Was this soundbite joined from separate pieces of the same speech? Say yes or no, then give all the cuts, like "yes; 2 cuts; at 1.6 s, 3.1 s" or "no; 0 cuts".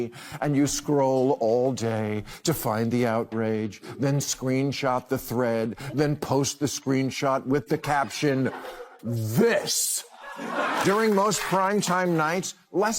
yes; 1 cut; at 10.3 s